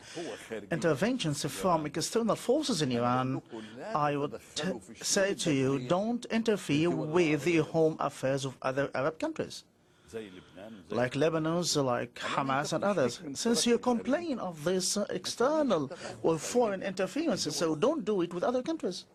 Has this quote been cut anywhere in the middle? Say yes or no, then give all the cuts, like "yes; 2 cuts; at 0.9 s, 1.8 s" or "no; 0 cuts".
no; 0 cuts